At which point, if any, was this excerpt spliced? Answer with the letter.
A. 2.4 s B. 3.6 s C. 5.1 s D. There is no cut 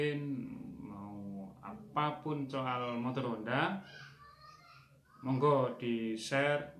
D